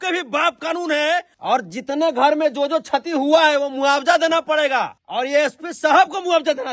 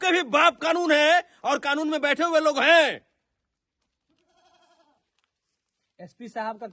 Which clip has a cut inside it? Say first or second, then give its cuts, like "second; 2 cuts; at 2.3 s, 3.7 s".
first; 2 cuts; at 1.3 s, 5.0 s